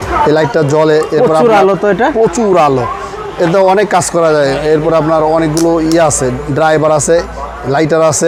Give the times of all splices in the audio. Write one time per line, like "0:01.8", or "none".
none